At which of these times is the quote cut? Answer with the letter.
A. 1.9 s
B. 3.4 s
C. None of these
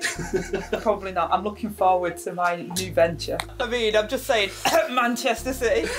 B